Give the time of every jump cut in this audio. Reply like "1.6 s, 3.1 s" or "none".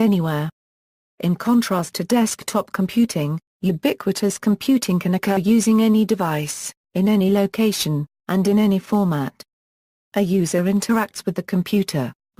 none